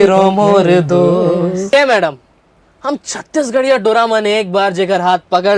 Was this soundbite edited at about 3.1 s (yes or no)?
no